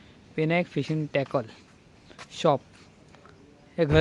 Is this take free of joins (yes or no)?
yes